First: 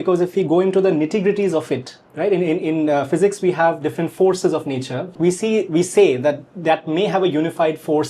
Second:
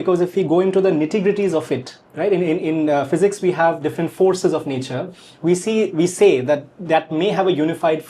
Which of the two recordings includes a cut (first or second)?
first